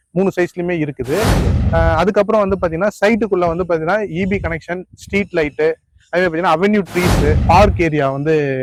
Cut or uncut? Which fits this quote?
uncut